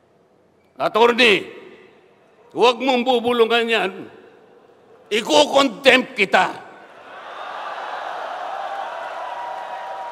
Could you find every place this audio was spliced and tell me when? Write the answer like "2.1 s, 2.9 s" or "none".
none